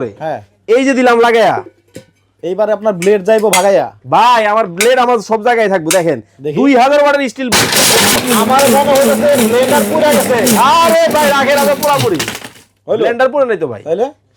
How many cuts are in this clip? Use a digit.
1